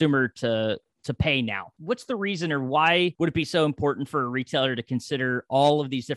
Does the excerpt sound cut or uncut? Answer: cut